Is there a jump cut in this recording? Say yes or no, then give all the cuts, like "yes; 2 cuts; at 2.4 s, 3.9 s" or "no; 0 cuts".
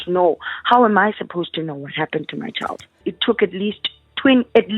yes; 1 cut; at 3.1 s